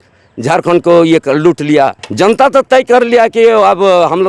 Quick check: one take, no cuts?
no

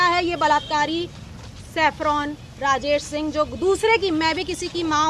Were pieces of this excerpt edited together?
no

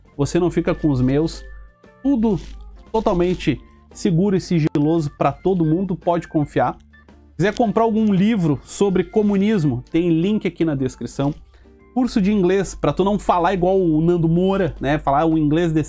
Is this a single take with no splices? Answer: yes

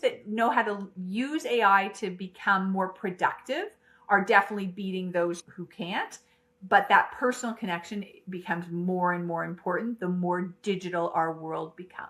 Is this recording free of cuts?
yes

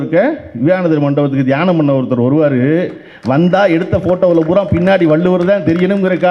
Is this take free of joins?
yes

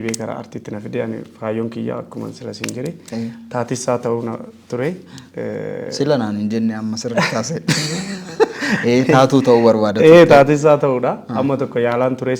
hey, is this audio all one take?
yes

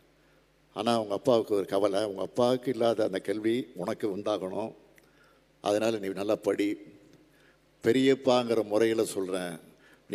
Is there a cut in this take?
no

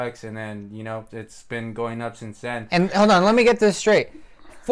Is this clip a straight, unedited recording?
no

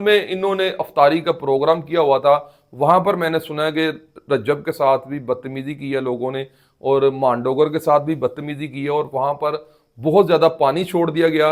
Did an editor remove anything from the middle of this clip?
no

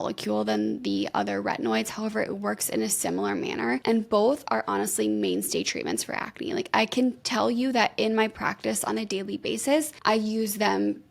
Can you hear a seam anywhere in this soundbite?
yes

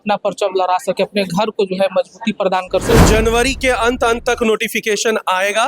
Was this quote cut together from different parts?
yes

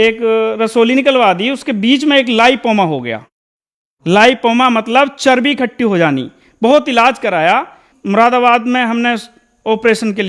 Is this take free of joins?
no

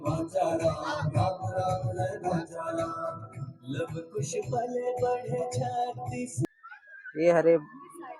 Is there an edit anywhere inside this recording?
yes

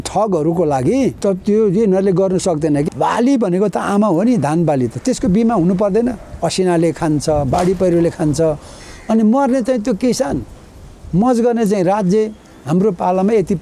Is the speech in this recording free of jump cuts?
no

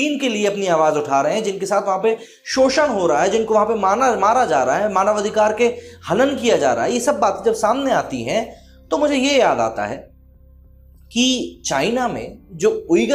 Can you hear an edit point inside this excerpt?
no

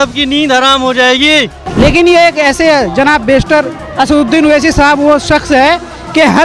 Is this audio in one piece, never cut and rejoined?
no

